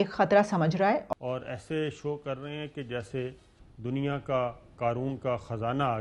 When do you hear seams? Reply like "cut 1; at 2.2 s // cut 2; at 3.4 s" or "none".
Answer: cut 1; at 1.0 s